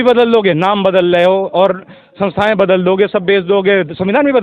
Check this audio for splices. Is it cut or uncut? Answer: uncut